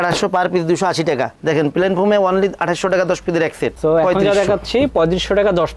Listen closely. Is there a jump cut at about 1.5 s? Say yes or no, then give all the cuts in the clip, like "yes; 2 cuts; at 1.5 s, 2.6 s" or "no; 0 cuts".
no; 1 cut; at 3.7 s